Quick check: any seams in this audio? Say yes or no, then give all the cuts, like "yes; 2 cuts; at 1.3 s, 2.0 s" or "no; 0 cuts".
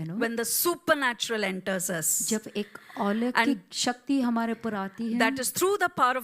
no; 0 cuts